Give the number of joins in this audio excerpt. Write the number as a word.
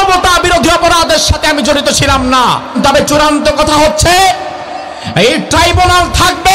one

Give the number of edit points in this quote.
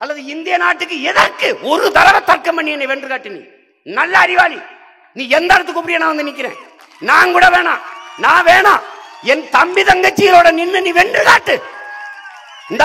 zero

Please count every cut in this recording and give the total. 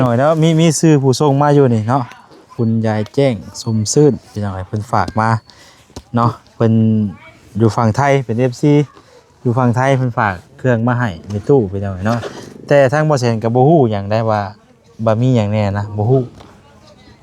one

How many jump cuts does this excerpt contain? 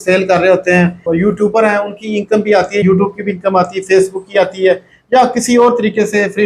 two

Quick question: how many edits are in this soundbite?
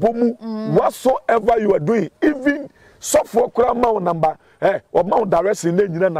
zero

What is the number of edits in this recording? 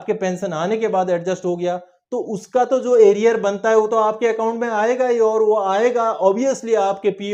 zero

